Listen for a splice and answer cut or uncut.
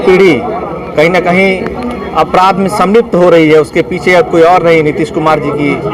uncut